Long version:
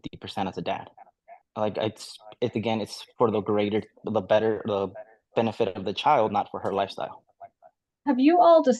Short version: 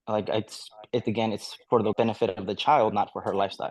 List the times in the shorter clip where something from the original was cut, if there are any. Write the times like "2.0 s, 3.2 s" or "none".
1.9 s